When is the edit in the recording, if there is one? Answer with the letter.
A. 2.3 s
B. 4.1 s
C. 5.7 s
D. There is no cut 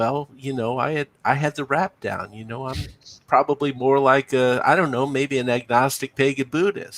D